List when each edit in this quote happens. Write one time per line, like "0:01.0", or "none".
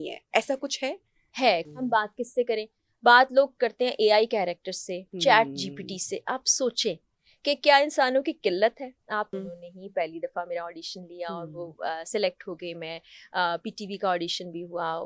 0:01.7
0:09.3